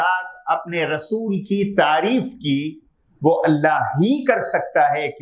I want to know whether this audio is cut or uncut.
uncut